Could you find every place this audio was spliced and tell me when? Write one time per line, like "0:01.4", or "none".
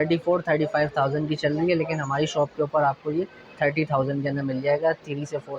none